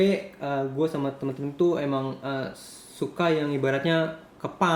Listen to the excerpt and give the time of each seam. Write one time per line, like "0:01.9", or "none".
none

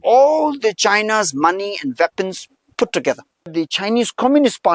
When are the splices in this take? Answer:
0:03.5

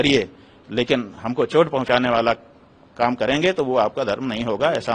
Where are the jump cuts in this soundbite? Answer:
none

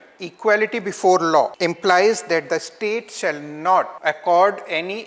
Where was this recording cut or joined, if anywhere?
0:01.5
0:03.9

